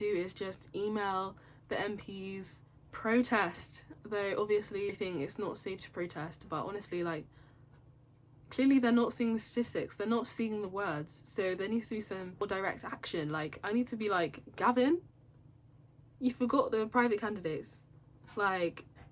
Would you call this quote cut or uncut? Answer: uncut